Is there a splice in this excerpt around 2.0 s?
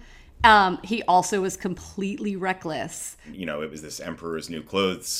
no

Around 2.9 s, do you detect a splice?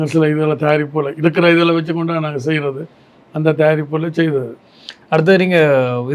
no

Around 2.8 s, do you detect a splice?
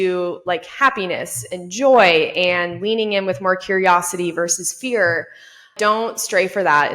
no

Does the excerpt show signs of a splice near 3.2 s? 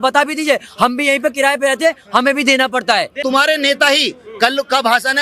yes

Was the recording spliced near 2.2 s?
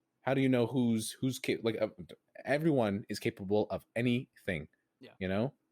yes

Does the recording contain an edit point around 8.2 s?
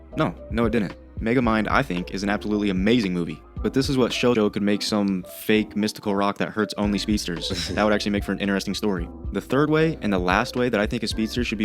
no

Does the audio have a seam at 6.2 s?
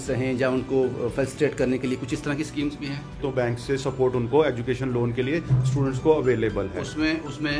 no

